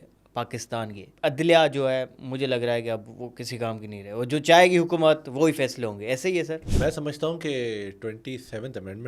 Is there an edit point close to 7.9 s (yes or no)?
no